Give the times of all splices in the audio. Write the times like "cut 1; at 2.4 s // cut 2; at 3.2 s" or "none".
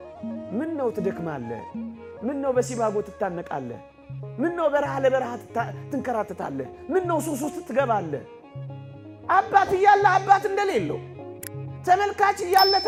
none